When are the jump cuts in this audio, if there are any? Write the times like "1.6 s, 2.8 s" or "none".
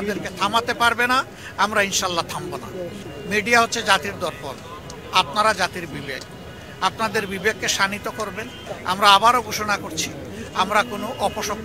3.0 s, 8.6 s